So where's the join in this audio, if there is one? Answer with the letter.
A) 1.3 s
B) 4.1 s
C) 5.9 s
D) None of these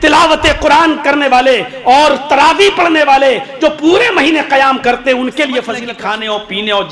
C